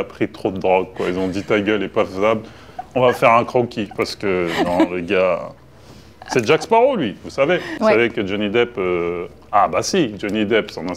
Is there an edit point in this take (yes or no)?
no